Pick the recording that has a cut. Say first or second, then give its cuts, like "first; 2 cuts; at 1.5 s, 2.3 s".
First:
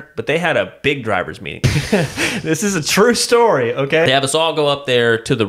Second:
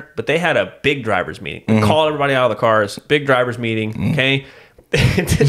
first; 2 cuts; at 1.5 s, 4.0 s